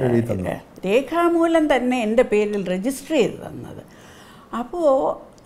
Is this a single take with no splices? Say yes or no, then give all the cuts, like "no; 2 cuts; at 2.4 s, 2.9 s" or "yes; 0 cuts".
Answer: yes; 0 cuts